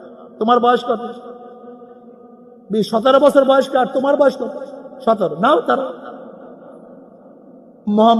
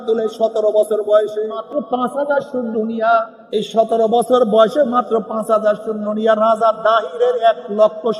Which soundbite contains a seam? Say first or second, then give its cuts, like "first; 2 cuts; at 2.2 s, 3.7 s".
second; 2 cuts; at 1.6 s, 3.4 s